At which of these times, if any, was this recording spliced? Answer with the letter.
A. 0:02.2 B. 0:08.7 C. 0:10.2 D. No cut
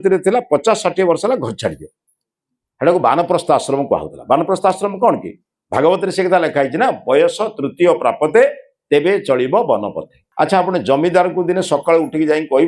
C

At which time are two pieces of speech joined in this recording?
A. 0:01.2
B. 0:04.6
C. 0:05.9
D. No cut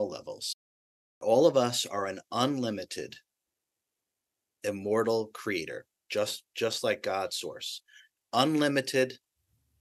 A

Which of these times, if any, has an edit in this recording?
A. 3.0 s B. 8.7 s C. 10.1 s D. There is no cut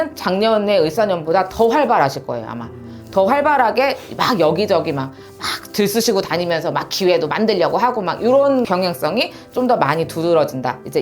B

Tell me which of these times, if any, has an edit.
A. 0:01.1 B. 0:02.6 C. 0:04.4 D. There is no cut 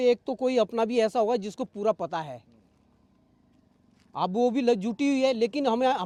D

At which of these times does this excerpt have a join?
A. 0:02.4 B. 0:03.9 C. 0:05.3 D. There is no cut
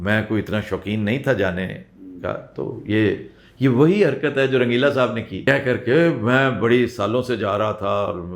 C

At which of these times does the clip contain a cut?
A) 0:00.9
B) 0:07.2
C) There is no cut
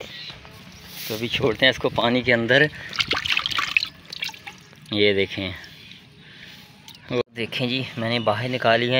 B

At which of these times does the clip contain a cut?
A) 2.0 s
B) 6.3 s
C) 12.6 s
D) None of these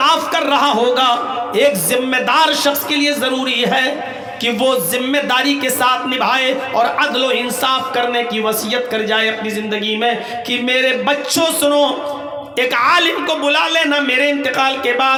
D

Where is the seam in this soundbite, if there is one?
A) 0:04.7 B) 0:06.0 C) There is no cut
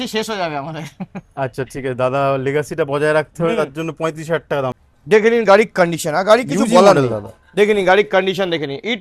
A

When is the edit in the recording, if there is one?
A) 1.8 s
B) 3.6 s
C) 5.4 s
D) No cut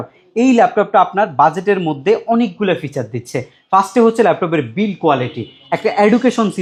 D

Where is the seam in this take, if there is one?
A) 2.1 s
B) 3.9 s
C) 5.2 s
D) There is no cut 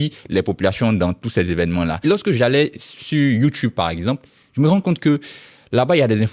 A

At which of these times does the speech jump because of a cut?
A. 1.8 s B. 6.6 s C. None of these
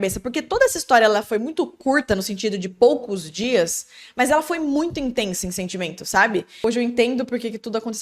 B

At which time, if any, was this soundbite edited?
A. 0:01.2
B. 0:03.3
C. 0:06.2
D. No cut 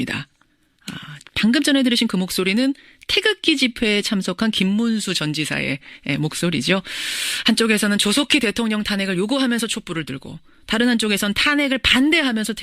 C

